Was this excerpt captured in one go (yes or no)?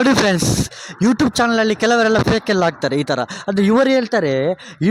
yes